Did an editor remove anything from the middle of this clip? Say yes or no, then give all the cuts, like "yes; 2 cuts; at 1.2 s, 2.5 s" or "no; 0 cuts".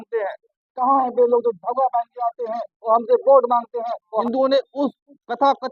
yes; 1 cut; at 4.1 s